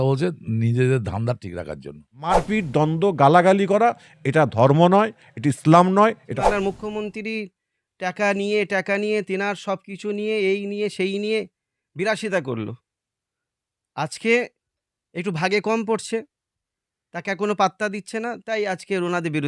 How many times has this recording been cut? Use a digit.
2